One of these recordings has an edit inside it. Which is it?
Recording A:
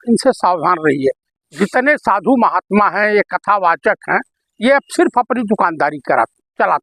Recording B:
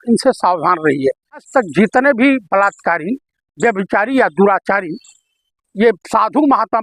B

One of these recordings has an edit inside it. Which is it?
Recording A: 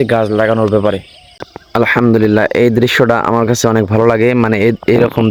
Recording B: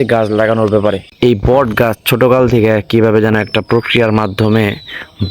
B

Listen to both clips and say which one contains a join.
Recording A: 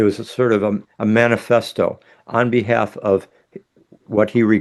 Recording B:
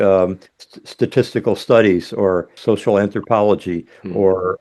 B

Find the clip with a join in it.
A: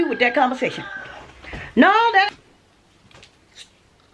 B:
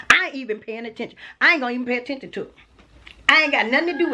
A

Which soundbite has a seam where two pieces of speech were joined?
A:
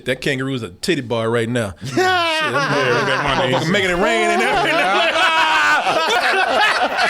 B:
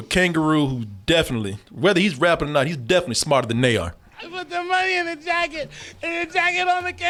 A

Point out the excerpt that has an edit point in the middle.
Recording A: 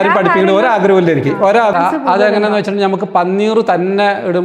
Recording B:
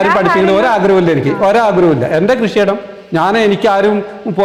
A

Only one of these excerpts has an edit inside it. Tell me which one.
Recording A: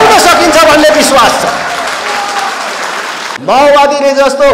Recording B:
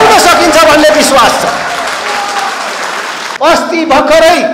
A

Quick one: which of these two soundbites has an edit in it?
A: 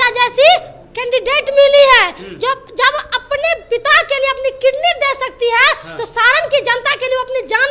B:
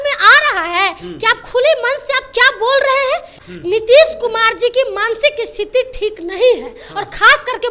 B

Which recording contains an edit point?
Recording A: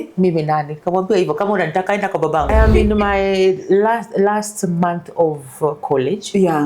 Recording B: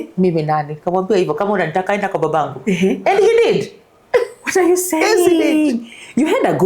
A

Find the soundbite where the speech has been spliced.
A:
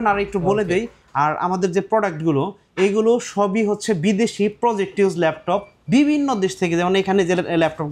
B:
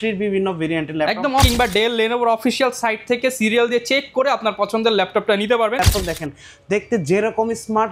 B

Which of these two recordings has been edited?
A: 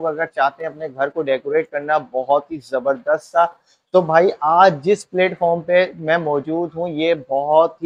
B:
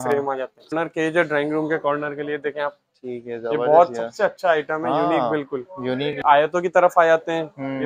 B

